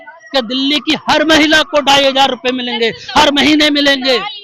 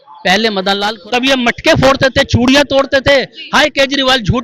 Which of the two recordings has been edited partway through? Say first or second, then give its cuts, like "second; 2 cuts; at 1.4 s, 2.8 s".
second; 1 cut; at 0.9 s